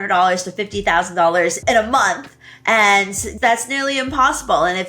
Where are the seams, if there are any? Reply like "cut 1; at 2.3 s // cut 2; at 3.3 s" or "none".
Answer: cut 1; at 1.6 s // cut 2; at 3.3 s